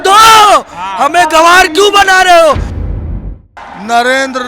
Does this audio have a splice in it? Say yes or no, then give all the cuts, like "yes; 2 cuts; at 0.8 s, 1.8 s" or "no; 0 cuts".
yes; 1 cut; at 3.1 s